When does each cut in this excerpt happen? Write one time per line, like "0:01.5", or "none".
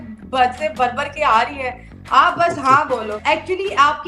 0:03.2